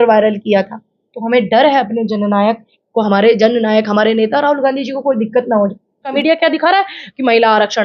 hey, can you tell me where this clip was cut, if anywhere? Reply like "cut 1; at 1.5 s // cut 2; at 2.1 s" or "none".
cut 1; at 6.2 s

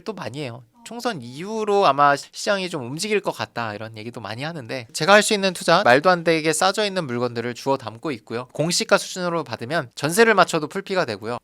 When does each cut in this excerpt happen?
cut 1; at 4.9 s // cut 2; at 8.5 s

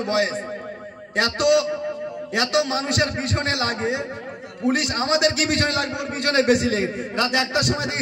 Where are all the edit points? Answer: none

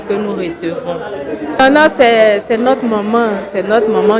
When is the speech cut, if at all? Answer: cut 1; at 1.6 s

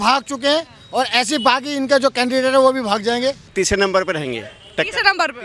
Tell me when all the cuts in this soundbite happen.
cut 1; at 3.5 s

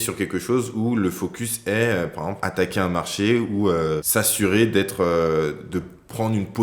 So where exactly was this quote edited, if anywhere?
cut 1; at 2.4 s // cut 2; at 4.0 s

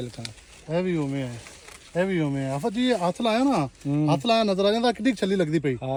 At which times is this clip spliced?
none

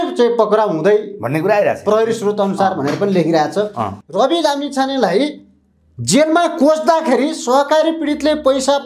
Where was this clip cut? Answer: cut 1; at 4.0 s

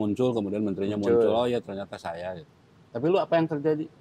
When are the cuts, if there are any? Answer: none

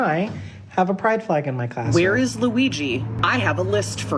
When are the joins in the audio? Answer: cut 1; at 1.8 s // cut 2; at 3.1 s

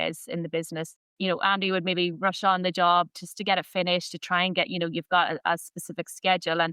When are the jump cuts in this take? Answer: cut 1; at 1.0 s

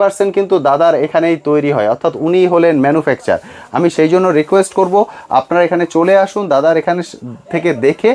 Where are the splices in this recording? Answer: none

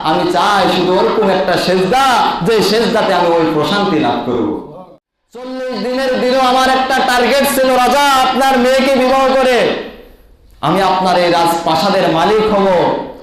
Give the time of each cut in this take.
cut 1; at 4.7 s

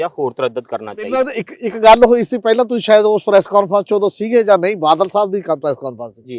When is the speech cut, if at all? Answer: cut 1; at 1.4 s

